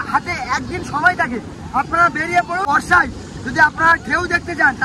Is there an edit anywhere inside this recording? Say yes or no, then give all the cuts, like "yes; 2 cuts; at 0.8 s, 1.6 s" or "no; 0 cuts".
yes; 1 cut; at 2.6 s